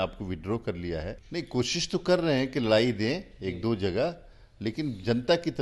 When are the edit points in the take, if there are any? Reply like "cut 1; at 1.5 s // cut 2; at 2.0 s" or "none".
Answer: cut 1; at 1.2 s